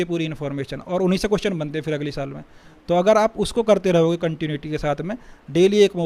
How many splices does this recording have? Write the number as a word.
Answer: zero